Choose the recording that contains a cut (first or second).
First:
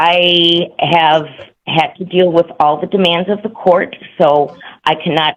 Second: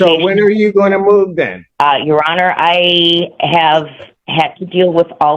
second